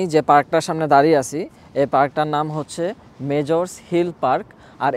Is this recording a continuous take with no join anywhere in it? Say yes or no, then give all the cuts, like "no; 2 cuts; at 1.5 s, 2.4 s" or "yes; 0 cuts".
yes; 0 cuts